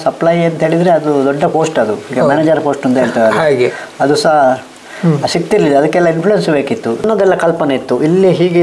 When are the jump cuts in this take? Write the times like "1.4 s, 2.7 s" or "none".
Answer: 7.0 s